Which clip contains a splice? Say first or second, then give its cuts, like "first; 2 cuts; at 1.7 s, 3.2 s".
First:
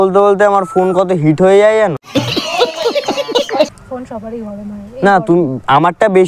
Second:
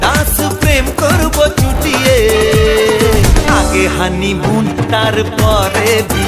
first; 1 cut; at 3.8 s